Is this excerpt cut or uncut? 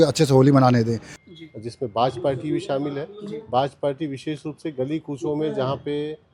cut